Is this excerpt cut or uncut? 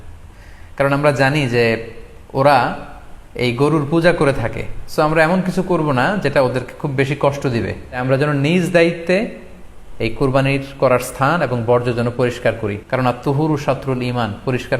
cut